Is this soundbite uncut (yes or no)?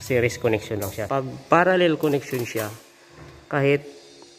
no